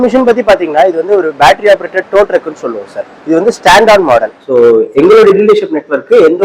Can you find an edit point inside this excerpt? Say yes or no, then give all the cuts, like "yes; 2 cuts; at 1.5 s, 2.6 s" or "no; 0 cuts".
yes; 1 cut; at 4.4 s